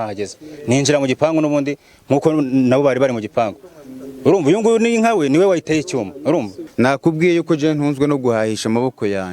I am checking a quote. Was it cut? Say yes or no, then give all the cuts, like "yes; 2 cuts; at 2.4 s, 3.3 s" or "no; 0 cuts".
yes; 1 cut; at 6.6 s